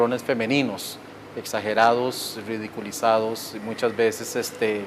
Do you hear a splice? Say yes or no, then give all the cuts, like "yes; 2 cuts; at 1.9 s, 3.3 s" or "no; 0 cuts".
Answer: yes; 1 cut; at 1.5 s